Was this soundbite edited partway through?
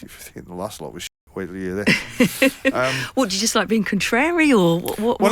no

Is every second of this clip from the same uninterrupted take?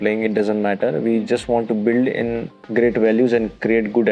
no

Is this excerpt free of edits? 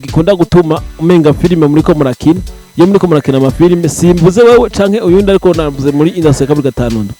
yes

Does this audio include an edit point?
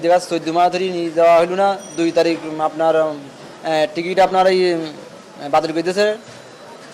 no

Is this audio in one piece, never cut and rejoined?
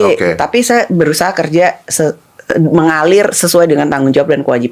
yes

